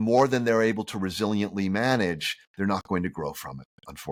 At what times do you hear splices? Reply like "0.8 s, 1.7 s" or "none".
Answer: none